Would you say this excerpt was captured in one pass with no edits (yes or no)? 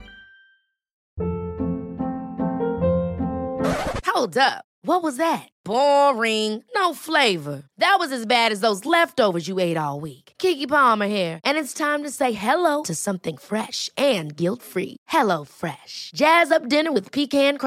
no